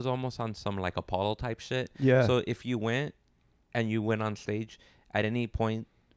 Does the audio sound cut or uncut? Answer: uncut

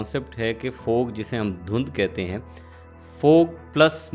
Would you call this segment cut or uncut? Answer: uncut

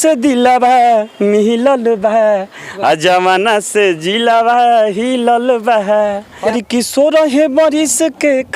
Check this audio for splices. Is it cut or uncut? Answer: cut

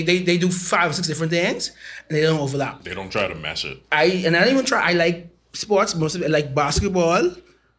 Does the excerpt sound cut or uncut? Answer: uncut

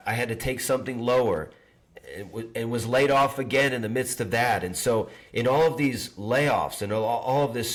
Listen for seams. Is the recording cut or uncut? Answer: uncut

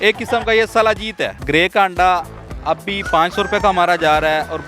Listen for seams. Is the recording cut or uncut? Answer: cut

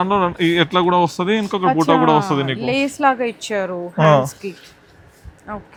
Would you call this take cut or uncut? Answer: uncut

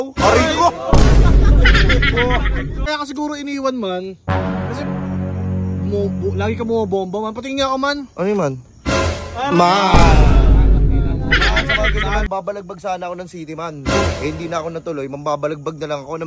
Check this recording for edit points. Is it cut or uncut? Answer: cut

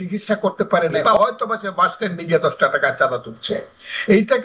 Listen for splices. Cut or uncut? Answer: cut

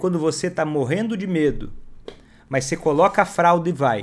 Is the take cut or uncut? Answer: uncut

